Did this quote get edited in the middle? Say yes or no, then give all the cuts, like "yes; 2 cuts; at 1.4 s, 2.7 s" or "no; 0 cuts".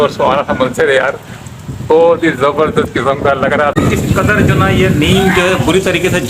yes; 1 cut; at 3.8 s